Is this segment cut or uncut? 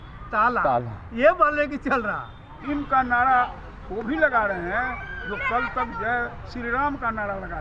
cut